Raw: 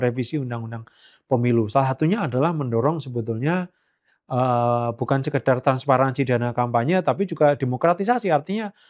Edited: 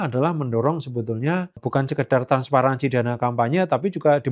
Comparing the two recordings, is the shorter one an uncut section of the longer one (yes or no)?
no